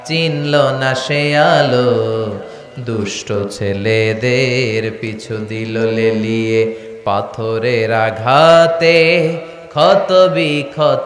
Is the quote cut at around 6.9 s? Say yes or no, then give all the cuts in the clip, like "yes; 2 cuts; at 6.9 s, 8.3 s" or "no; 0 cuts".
no; 0 cuts